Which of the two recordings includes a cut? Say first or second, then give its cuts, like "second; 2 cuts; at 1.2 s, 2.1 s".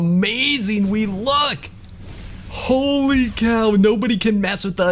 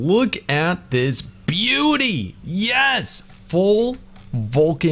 second; 1 cut; at 2.3 s